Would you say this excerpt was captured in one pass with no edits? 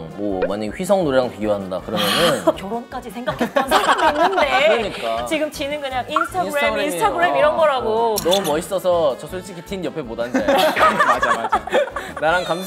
no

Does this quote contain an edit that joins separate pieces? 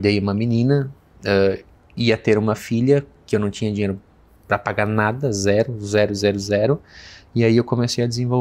no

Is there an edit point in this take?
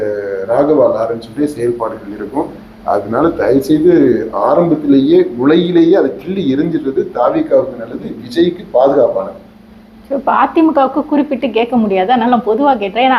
no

